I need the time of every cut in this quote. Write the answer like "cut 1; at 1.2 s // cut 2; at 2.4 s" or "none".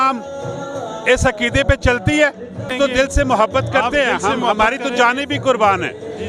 cut 1; at 2.7 s